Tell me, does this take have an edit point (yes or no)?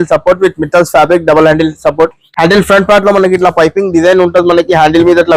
no